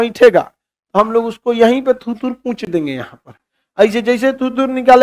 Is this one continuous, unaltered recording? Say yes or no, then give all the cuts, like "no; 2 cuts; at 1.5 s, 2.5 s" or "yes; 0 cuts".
yes; 0 cuts